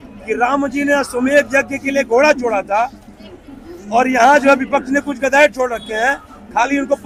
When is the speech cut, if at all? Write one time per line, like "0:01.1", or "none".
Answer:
none